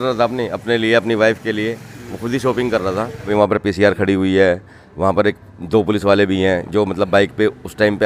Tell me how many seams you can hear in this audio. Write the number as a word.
one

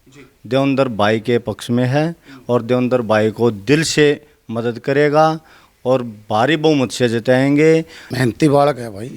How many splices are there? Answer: one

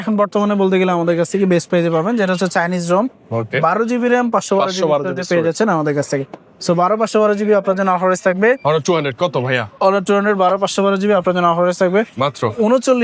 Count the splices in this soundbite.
zero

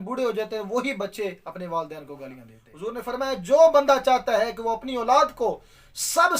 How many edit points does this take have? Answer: one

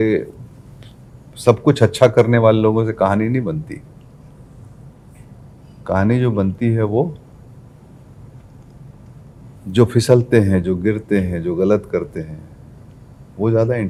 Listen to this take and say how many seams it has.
zero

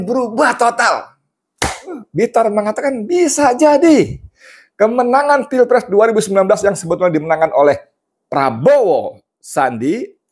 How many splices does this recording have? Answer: one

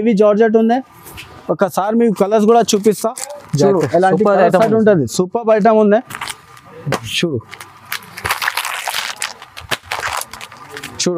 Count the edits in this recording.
zero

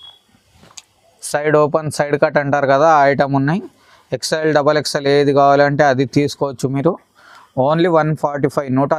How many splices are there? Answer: zero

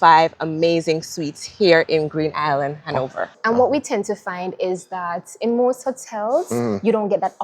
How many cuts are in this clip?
one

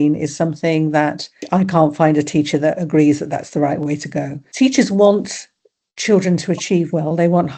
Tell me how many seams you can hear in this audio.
two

